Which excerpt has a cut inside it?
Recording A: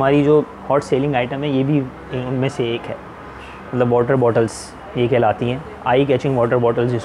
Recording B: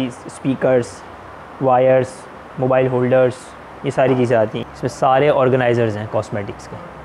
B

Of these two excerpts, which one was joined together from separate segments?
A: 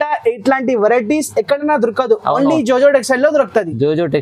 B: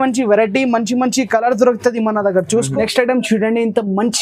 B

